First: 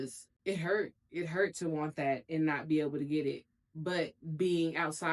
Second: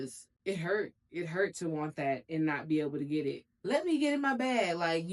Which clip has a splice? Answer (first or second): second